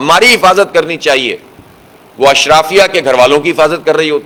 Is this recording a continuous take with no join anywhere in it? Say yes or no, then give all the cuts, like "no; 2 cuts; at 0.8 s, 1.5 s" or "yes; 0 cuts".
yes; 0 cuts